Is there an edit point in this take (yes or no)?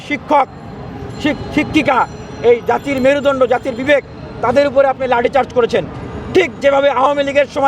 no